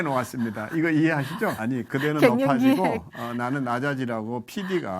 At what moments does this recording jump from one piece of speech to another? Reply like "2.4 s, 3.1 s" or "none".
1.6 s